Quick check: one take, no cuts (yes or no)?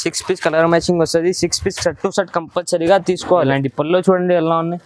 no